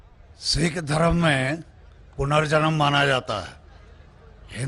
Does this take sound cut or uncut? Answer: uncut